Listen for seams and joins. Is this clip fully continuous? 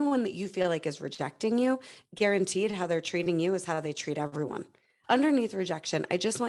no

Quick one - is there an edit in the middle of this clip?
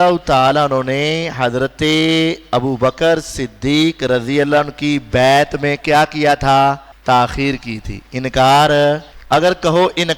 yes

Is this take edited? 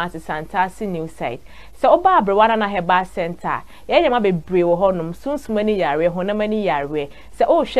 no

